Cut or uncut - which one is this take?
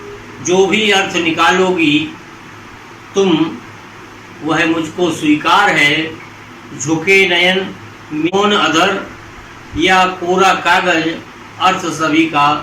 cut